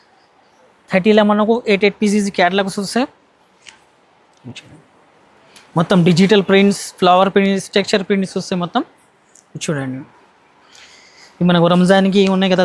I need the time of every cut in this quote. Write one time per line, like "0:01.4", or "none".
none